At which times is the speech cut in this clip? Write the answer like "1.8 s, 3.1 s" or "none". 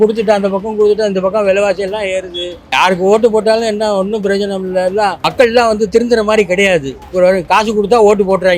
none